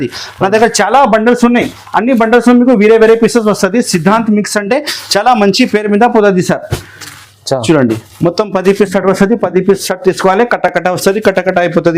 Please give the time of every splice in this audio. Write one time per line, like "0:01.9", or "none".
none